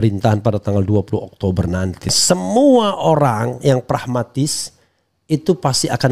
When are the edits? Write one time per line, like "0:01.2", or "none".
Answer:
0:02.1